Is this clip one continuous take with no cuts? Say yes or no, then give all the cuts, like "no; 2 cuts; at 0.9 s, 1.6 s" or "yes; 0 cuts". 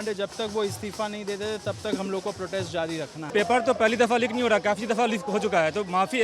no; 1 cut; at 3.2 s